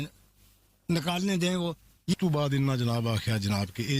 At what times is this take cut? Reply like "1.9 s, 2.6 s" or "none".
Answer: 2.1 s